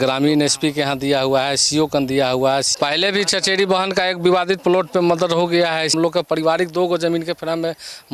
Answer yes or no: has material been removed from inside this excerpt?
yes